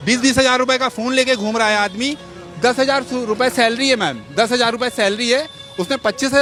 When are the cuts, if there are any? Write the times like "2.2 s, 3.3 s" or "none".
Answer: none